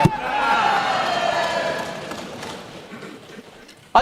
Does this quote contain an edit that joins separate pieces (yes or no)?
no